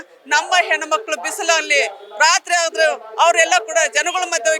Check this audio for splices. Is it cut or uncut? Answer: uncut